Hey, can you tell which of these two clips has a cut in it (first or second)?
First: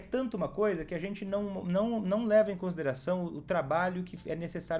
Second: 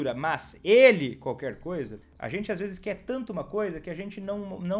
second